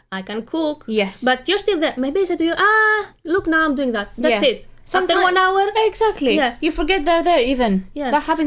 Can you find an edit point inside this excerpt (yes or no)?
no